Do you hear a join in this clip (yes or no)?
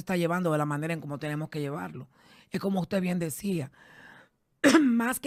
no